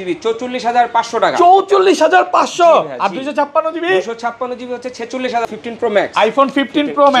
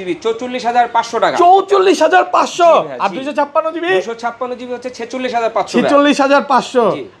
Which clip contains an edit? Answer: first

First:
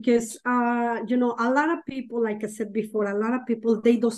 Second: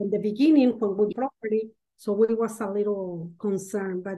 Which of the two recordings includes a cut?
second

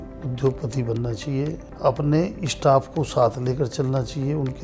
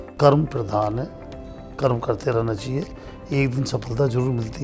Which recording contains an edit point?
first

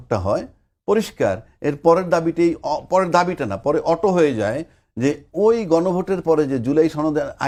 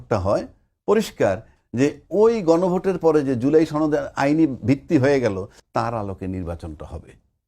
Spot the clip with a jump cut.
second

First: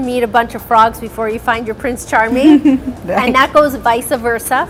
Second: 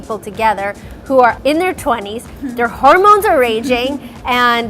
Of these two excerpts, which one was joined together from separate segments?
second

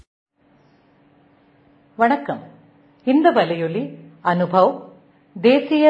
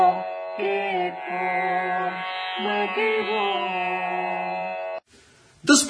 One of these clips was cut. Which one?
second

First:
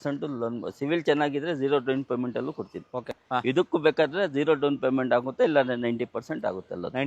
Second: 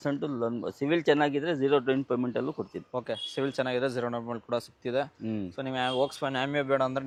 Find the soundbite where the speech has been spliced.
first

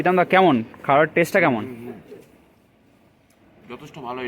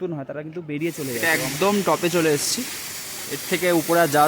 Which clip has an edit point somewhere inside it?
second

